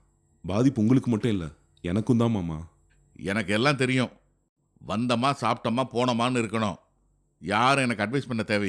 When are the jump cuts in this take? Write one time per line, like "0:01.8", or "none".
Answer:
none